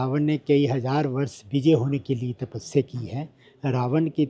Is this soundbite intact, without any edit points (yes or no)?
yes